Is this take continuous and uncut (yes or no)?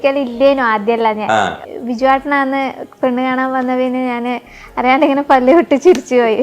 no